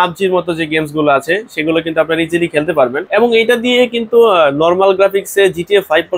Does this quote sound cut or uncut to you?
uncut